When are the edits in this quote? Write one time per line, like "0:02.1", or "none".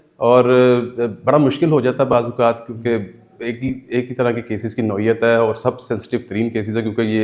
none